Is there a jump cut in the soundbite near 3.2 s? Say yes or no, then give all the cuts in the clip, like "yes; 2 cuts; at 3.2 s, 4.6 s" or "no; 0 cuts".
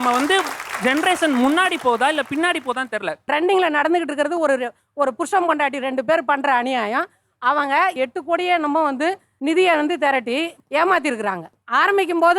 yes; 1 cut; at 3.2 s